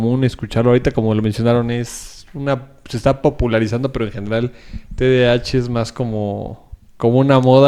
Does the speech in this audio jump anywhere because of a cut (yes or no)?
no